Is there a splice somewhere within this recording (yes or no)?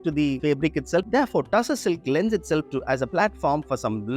yes